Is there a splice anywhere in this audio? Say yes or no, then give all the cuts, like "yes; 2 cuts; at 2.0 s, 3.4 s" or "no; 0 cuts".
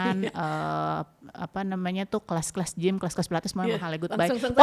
no; 0 cuts